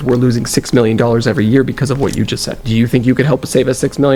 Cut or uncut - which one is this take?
uncut